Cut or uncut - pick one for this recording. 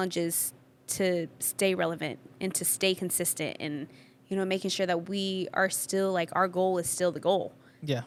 uncut